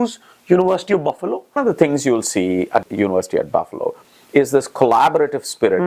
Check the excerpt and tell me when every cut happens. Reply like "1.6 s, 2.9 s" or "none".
1.6 s, 2.8 s